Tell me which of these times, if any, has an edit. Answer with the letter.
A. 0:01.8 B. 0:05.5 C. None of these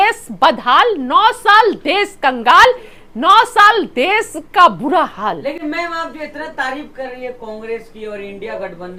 C